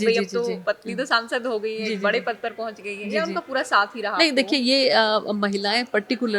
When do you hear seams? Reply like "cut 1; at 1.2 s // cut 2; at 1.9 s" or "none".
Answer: none